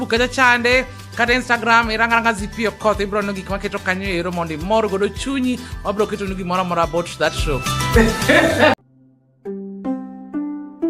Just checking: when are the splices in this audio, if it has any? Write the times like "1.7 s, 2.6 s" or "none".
8.7 s